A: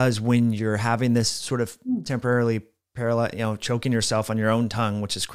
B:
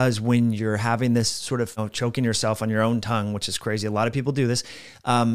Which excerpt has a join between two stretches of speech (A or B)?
B